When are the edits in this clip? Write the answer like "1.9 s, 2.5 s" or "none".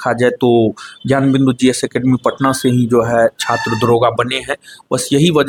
none